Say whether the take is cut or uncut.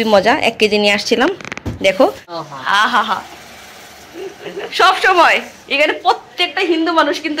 cut